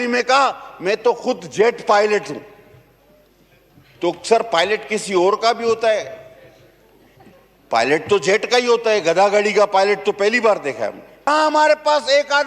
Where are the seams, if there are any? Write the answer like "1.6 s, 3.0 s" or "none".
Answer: 11.3 s